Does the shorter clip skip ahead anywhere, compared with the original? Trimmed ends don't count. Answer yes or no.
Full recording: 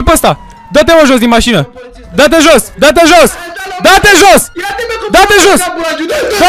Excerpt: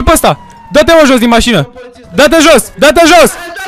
no